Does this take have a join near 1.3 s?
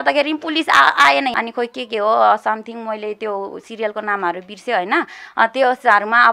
yes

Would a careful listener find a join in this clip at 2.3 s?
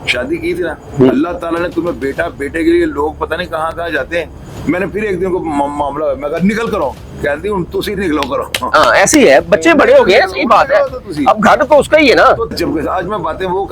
no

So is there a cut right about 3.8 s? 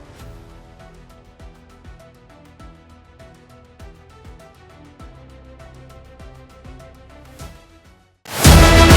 no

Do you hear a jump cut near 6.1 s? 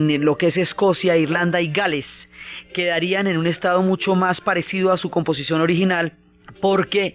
yes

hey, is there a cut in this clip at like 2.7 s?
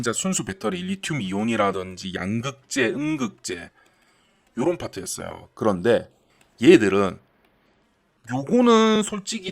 no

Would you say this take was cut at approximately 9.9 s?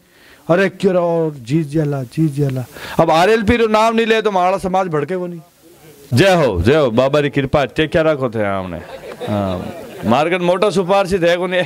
no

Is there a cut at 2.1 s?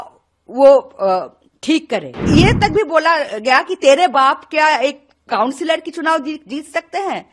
yes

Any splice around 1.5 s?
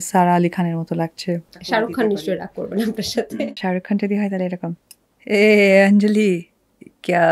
yes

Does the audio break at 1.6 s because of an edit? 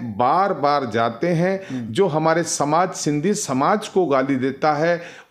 no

